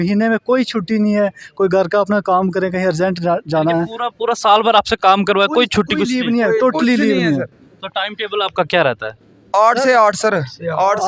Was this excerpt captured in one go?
yes; 0 cuts

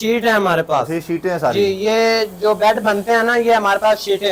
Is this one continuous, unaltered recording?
yes; 0 cuts

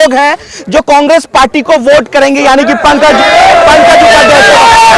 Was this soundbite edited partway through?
no; 0 cuts

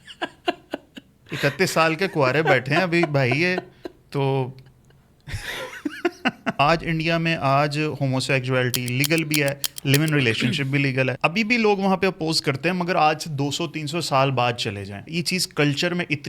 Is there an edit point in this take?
yes; 3 cuts; at 6.5 s, 11.2 s, 15.1 s

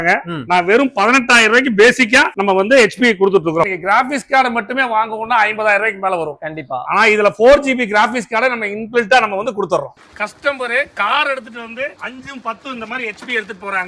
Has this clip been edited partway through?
yes; 2 cuts; at 3.7 s, 9.9 s

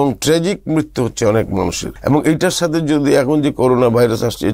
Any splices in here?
yes; 1 cut; at 1.9 s

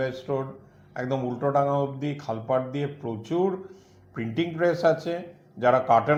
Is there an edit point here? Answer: no; 0 cuts

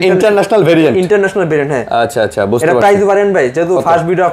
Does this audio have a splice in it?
no; 0 cuts

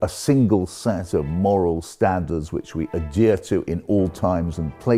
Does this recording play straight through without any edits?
yes; 0 cuts

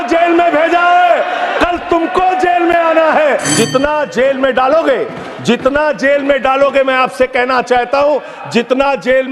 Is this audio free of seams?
no; 1 cut; at 3.5 s

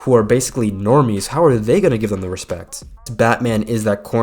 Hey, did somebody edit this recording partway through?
yes; 1 cut; at 3.1 s

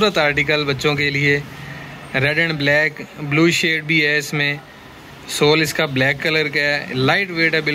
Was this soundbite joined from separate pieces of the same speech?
no; 0 cuts

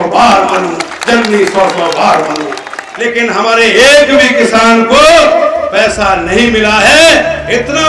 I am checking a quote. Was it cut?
yes; 1 cut; at 2.9 s

